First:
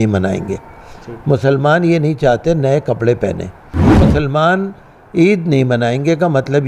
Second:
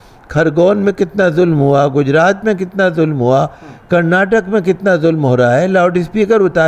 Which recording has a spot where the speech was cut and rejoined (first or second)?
first